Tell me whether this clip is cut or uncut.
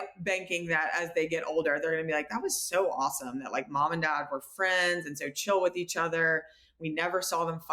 uncut